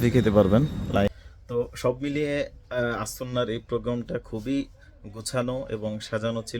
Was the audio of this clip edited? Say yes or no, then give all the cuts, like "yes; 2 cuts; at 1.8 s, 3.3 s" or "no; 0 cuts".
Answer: yes; 1 cut; at 1.1 s